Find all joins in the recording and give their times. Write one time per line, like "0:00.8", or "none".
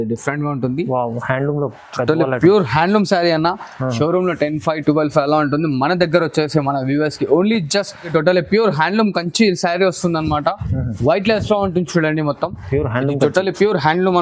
0:08.1

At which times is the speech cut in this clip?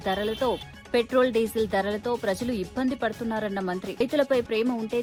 none

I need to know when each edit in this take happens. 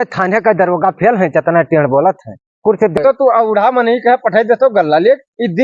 0:03.0

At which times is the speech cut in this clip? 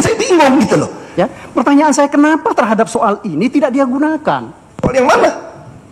0:01.0

